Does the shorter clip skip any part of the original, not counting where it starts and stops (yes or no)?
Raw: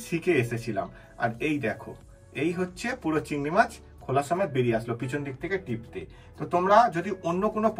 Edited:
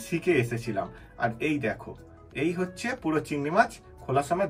no